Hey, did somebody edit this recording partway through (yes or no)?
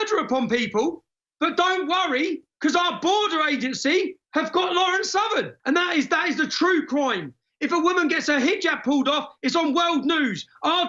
yes